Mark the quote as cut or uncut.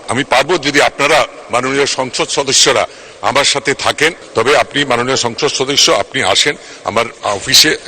cut